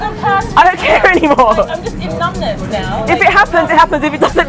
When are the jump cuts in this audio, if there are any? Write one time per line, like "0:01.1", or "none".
none